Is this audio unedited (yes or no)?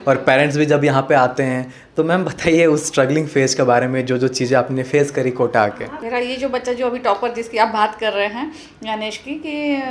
no